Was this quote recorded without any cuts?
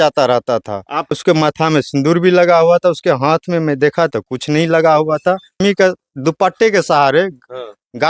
no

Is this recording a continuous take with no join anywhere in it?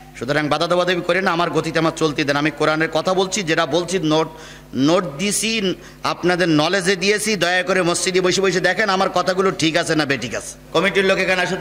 yes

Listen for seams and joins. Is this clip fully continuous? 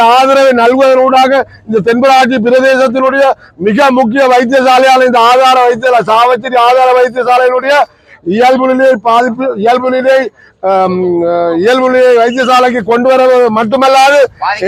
yes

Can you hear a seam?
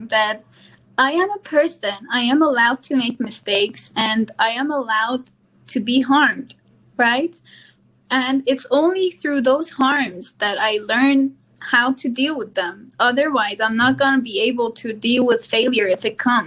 no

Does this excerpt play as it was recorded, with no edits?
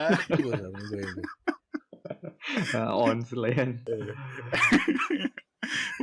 no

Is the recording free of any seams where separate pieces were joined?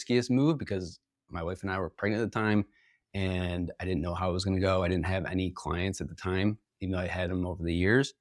yes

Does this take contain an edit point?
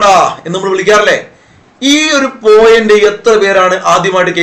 no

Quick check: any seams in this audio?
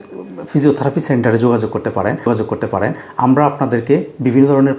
no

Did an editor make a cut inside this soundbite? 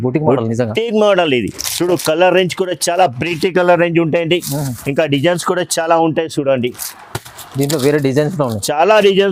no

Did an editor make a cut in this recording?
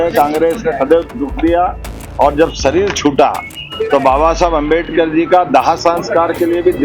no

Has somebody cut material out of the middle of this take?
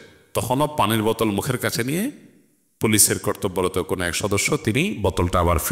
no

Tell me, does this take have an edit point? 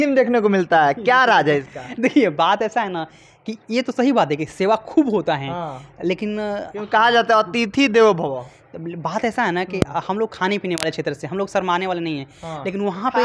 no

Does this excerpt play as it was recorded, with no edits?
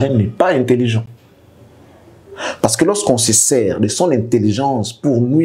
yes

